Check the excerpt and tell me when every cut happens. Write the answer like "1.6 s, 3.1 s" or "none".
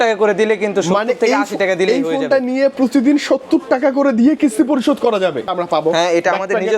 5.5 s